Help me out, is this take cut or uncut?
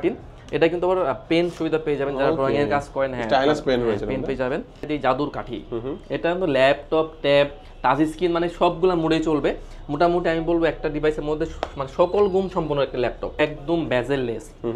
cut